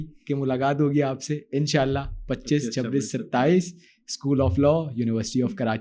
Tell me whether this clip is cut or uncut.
uncut